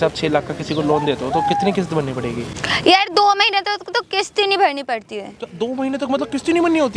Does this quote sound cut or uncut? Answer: uncut